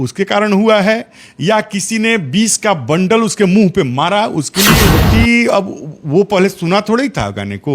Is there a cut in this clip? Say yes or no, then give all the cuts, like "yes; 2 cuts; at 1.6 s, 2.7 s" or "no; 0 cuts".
yes; 1 cut; at 4.8 s